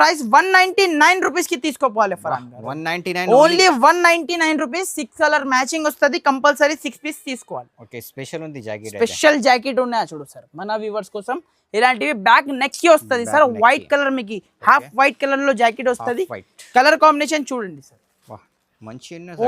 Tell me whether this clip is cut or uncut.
cut